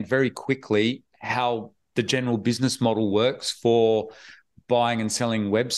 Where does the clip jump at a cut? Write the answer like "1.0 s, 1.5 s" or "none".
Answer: none